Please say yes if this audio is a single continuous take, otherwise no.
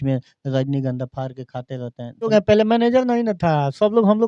no